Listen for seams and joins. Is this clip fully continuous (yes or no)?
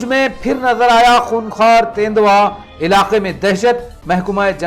yes